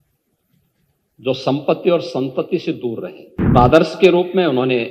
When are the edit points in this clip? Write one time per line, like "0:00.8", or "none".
0:03.5